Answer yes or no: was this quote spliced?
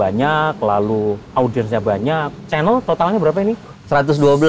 yes